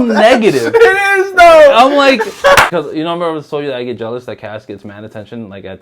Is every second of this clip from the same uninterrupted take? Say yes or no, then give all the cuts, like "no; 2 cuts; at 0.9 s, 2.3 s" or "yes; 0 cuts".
no; 1 cut; at 2.7 s